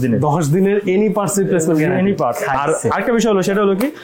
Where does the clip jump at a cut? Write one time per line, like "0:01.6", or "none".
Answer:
none